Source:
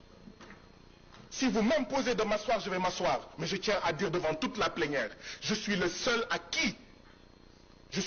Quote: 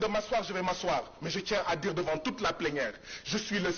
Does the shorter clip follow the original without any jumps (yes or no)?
yes